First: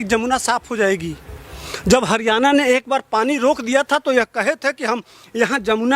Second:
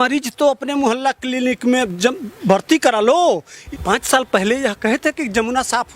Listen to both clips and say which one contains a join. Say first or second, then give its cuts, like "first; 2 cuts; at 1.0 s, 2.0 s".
second; 1 cut; at 3.5 s